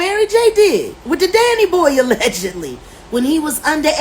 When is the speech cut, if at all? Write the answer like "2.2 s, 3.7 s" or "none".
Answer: 1.0 s

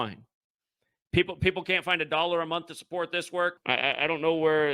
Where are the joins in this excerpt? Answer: 3.6 s

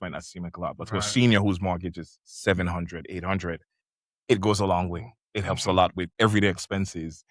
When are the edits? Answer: 6.0 s

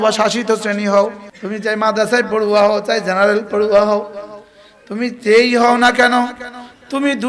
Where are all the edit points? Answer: 1.3 s

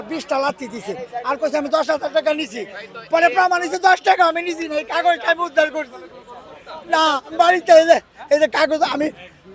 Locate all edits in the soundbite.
none

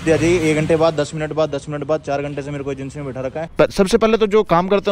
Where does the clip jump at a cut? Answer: 3.4 s

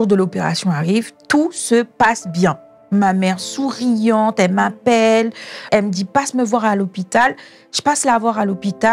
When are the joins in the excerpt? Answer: 2.7 s, 5.7 s

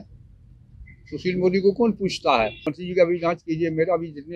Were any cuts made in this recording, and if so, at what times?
2.7 s

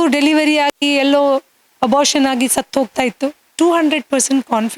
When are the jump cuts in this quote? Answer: 3.4 s

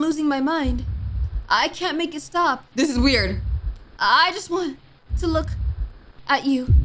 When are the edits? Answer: 2.7 s

